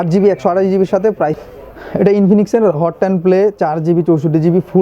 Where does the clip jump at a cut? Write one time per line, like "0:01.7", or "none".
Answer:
0:01.4